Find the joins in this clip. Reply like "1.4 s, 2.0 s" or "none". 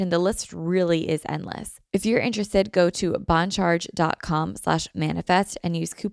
1.7 s